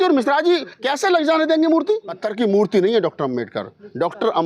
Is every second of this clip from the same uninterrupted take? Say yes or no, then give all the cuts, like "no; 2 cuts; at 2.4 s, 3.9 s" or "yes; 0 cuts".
no; 1 cut; at 2.2 s